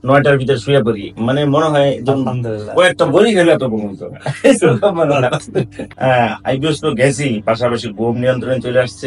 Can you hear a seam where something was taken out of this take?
yes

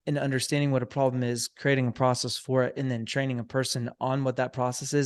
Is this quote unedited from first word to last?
yes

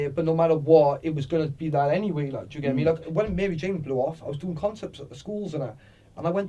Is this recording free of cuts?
no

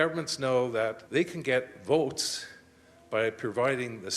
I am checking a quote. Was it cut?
yes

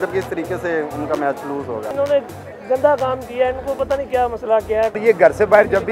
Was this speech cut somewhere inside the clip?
yes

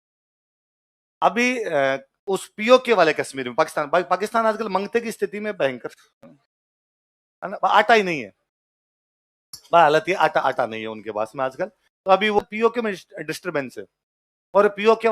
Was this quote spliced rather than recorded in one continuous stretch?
yes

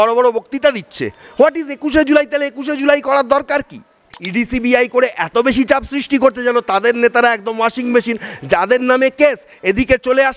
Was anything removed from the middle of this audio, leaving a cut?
yes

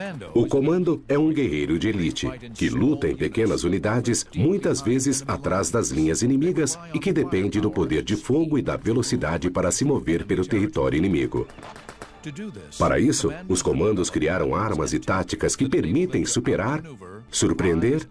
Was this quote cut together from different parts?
yes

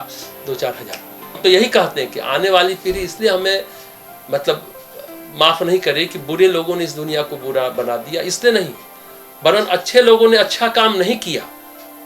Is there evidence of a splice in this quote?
yes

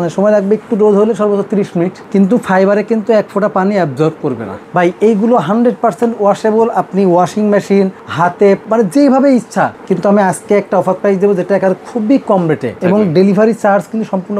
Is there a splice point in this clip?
yes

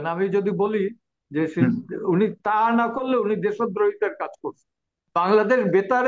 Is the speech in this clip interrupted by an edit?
yes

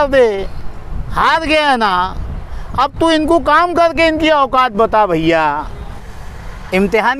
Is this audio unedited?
no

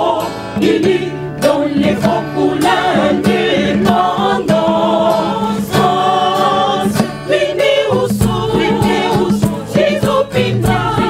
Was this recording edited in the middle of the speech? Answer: no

